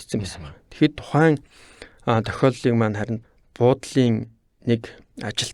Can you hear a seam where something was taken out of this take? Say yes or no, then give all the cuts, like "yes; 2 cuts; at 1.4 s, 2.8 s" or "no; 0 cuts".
yes; 1 cut; at 3.2 s